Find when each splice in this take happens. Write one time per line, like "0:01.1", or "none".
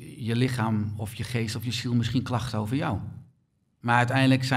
0:03.7